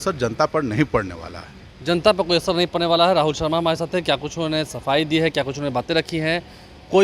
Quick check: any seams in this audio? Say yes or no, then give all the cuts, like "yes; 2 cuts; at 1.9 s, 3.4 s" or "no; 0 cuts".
no; 0 cuts